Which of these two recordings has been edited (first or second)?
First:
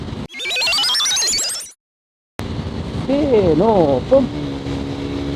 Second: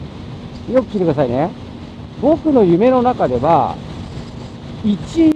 first